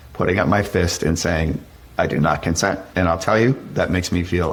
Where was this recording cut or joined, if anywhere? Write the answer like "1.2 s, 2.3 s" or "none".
none

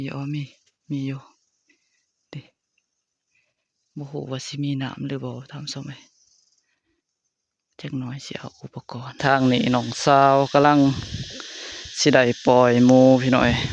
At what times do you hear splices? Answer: 9.1 s

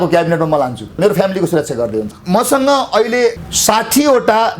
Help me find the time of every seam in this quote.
1.0 s, 2.1 s, 3.4 s

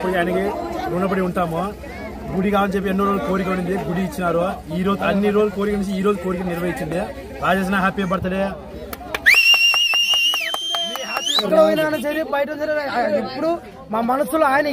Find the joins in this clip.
11.4 s

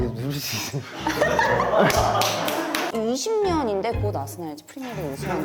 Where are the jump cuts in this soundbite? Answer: 2.9 s

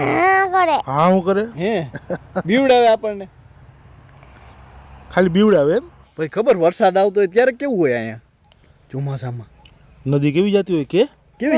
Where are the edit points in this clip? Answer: none

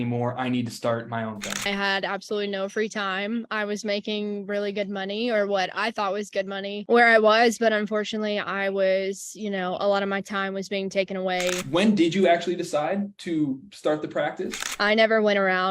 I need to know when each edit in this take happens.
1.5 s, 11.6 s, 14.7 s

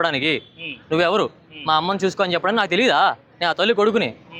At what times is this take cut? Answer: none

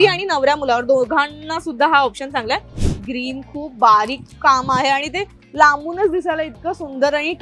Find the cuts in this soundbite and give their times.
2.8 s

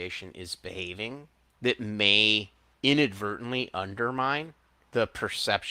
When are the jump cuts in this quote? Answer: 1.4 s, 2.6 s, 4.8 s

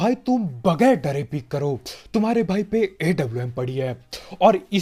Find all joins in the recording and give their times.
none

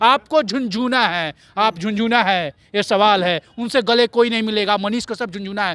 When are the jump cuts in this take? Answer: none

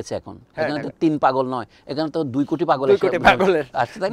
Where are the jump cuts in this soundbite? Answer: none

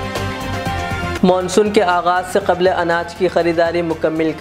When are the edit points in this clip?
none

